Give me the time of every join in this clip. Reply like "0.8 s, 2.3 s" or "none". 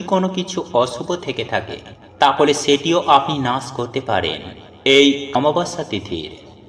5.3 s